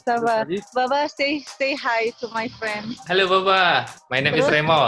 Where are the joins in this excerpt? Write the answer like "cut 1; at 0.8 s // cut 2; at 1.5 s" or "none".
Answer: cut 1; at 2.9 s // cut 2; at 4.0 s